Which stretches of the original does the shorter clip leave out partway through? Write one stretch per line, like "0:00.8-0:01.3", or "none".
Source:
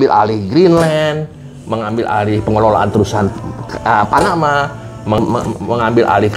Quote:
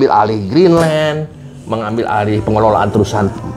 none